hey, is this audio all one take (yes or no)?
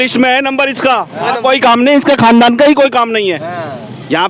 no